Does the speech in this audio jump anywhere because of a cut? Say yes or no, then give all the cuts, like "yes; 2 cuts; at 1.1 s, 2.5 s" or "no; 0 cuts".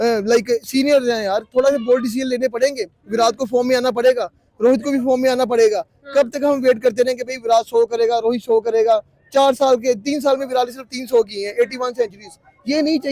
no; 0 cuts